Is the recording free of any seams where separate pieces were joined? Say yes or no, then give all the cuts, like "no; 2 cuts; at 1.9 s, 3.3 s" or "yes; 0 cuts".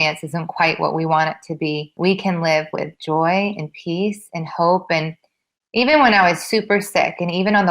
no; 1 cut; at 1.9 s